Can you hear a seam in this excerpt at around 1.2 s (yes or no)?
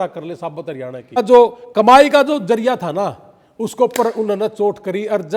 yes